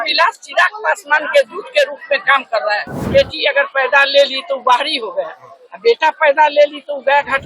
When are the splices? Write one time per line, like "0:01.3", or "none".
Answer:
0:03.1